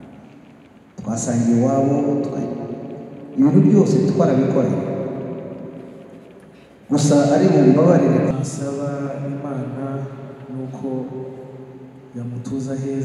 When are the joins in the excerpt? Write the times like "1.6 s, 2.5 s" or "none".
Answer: 8.3 s

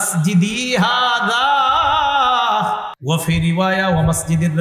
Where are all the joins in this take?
2.9 s

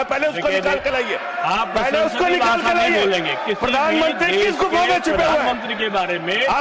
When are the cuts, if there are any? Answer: 1.2 s

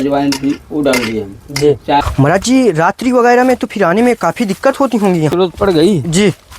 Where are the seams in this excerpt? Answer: 1.8 s, 5.3 s

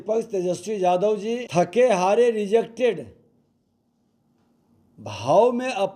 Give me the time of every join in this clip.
1.5 s

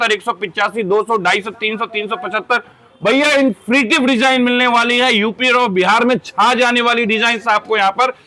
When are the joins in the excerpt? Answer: none

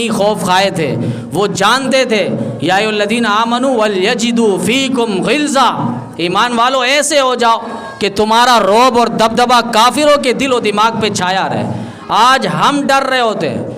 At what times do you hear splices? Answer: none

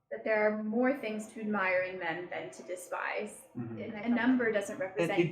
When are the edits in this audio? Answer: 4.0 s

